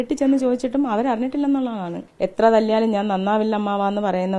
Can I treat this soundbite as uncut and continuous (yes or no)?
no